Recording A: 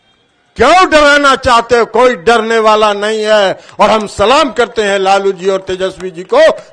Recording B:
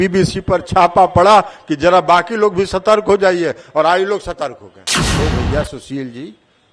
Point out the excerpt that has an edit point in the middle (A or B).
B